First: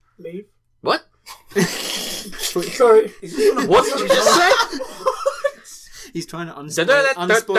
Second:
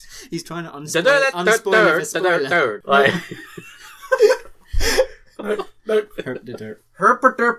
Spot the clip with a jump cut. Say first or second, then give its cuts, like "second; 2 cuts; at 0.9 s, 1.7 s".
second; 1 cut; at 2.8 s